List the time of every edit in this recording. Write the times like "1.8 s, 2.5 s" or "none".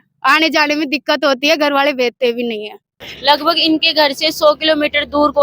3.0 s